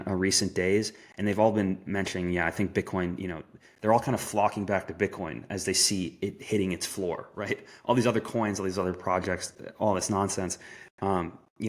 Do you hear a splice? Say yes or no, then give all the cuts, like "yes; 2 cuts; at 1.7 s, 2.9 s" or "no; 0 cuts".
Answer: no; 0 cuts